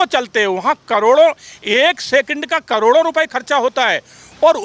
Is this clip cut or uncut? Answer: uncut